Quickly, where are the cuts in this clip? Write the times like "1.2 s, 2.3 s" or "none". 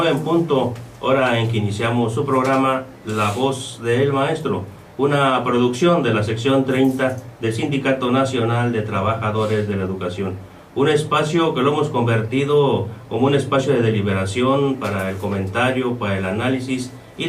none